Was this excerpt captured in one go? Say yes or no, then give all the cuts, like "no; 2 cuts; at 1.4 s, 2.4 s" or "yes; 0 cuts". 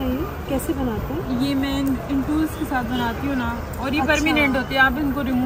yes; 0 cuts